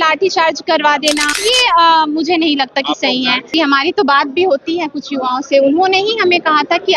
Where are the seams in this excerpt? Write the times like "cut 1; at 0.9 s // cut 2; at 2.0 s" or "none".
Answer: cut 1; at 1.3 s